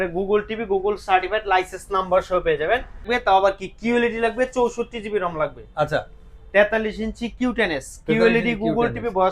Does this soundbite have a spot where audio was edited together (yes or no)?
yes